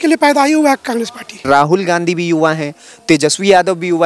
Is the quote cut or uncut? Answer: cut